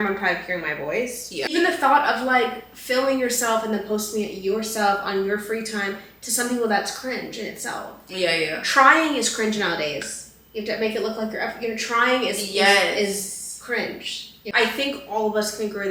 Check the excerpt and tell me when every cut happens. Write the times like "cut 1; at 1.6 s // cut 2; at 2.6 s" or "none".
cut 1; at 1.5 s // cut 2; at 14.5 s